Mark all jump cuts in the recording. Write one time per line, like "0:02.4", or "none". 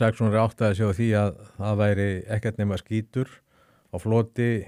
none